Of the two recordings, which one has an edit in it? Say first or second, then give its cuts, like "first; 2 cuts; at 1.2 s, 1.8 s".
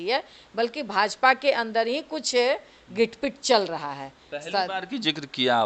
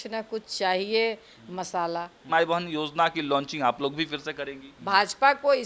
second; 2 cuts; at 2.2 s, 4.7 s